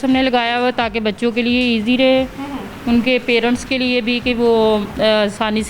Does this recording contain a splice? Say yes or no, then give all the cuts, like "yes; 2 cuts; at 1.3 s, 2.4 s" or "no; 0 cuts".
no; 0 cuts